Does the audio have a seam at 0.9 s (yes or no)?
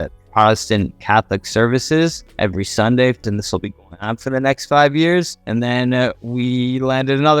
no